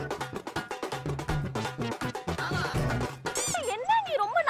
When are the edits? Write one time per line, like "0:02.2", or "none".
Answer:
0:03.6